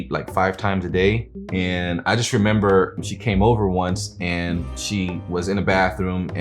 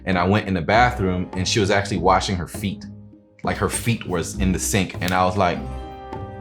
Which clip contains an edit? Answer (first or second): first